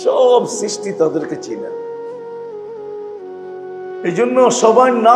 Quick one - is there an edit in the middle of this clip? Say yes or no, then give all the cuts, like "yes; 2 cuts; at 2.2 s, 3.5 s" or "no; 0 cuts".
no; 0 cuts